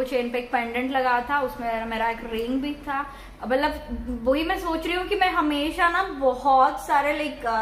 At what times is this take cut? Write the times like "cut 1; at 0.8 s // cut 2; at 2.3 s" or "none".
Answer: none